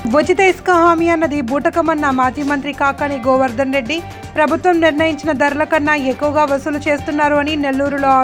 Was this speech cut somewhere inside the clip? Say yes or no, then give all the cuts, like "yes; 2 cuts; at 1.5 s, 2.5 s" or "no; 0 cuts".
no; 0 cuts